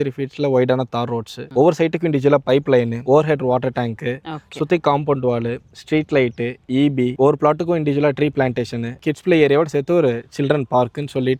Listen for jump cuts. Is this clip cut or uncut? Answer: uncut